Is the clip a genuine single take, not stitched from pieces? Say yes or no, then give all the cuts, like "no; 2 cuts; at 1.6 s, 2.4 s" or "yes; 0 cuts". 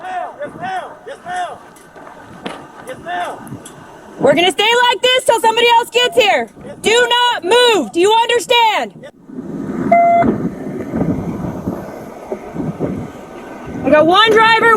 no; 2 cuts; at 2.7 s, 7.1 s